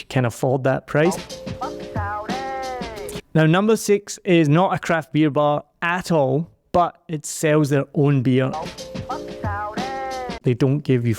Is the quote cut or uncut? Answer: cut